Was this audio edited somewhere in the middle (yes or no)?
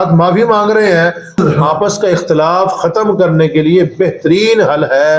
yes